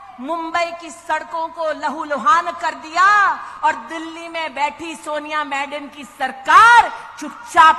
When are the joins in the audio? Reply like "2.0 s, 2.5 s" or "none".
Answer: none